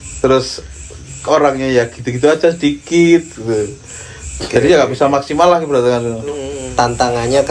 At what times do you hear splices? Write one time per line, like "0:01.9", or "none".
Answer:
0:06.5